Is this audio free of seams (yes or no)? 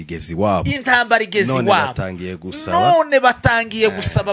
yes